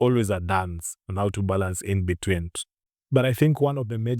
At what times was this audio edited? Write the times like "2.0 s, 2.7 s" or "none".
2.9 s